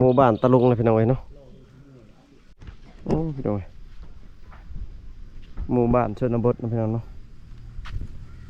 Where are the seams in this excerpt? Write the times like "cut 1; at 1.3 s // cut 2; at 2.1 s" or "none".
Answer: cut 1; at 2.6 s